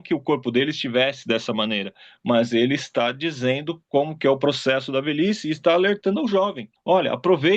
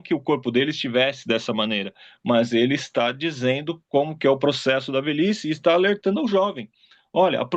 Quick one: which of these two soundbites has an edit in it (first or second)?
first